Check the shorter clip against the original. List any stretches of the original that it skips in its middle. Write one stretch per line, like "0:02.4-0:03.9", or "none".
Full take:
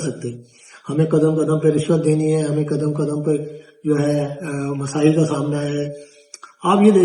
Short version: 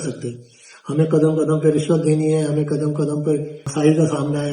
0:03.6-0:04.8